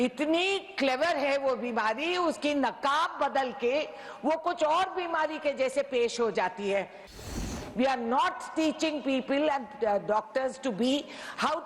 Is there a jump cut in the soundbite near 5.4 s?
no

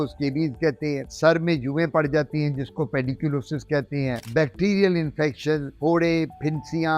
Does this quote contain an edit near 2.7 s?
no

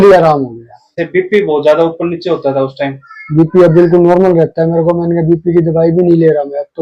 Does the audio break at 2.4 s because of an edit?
no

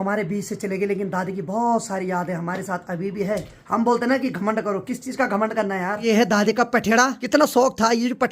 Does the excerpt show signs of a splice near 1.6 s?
no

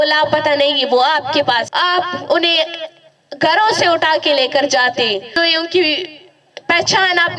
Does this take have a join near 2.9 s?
no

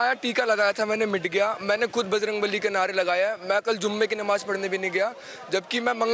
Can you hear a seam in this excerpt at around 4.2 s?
no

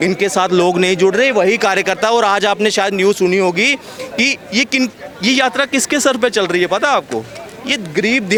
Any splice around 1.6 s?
no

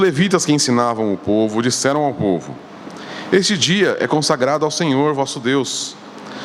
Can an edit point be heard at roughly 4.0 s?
no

